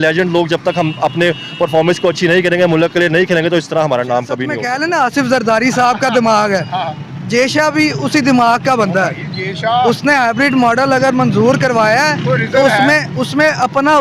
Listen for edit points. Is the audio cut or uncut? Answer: cut